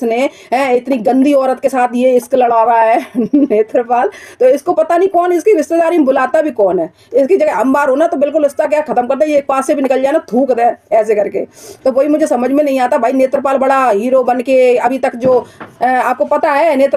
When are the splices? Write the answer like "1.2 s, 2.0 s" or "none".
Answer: none